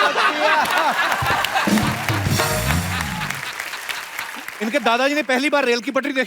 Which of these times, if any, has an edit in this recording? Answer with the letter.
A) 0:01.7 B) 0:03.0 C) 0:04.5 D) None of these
C